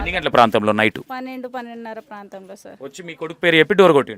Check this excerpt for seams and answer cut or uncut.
cut